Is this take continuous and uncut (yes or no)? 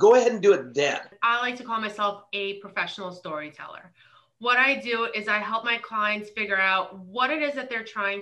no